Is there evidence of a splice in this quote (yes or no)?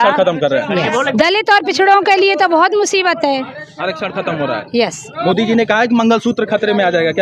yes